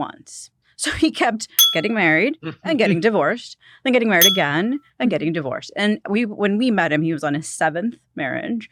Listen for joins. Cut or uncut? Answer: uncut